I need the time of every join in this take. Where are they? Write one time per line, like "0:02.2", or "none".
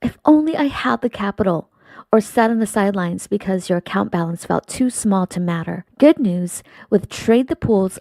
0:04.9